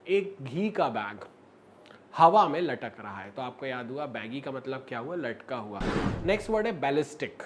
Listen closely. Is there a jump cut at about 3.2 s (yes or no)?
no